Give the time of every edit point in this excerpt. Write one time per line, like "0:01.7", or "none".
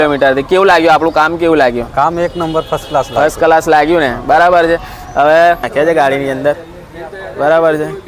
0:05.7